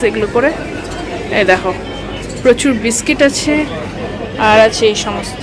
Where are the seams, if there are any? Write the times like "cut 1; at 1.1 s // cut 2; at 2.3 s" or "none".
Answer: none